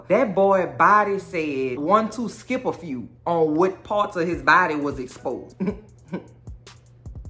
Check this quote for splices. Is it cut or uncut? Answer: cut